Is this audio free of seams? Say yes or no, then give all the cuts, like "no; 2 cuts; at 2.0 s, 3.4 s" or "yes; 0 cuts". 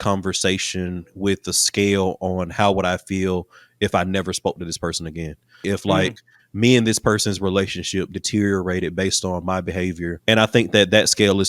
no; 2 cuts; at 5.7 s, 10.1 s